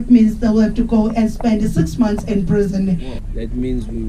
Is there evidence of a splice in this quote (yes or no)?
yes